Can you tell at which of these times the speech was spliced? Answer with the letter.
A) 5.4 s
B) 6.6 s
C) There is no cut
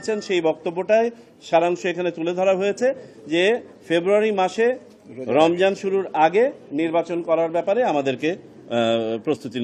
C